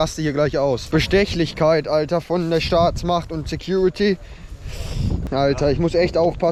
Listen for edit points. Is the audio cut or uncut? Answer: uncut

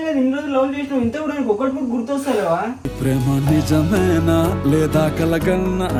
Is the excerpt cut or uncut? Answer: uncut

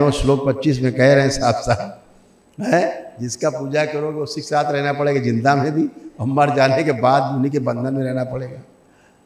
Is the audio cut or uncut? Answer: uncut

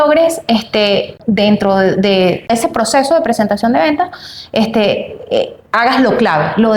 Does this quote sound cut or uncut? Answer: cut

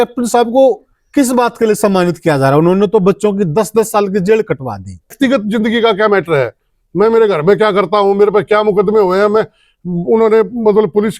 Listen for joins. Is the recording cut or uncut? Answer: cut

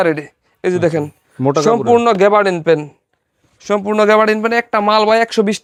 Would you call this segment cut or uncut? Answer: uncut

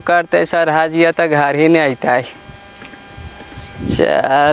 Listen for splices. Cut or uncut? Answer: uncut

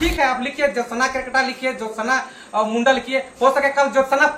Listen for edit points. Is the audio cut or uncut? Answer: uncut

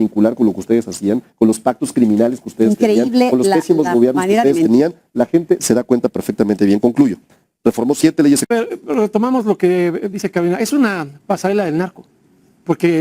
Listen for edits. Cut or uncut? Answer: cut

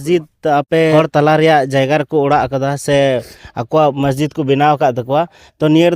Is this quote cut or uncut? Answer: cut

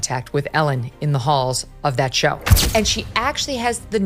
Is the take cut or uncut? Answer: cut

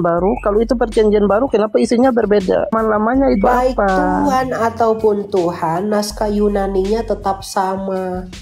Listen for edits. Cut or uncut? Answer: cut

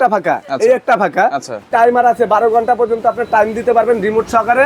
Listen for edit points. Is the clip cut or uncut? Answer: cut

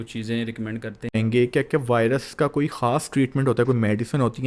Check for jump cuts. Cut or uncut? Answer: cut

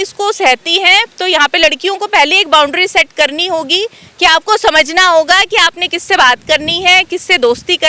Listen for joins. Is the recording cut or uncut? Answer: uncut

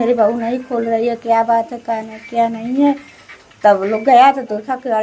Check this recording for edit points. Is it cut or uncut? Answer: uncut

